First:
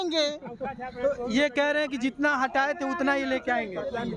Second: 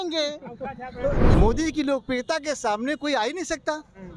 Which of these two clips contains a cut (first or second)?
second